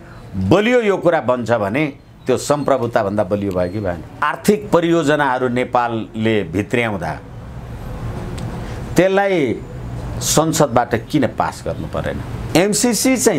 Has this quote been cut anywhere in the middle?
yes; 2 cuts; at 4.2 s, 12.4 s

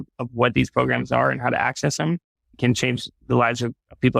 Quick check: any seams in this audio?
yes; 1 cut; at 2.6 s

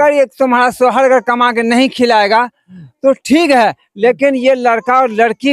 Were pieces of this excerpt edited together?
no; 0 cuts

